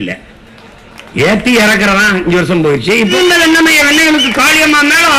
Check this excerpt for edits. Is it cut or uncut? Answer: cut